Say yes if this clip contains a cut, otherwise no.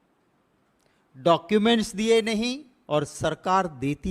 yes